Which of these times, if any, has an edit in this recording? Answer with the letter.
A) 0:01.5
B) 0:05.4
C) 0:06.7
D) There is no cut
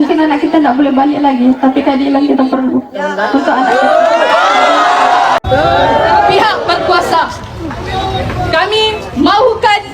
B